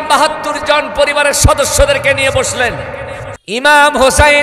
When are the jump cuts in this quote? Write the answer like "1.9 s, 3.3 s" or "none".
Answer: 3.4 s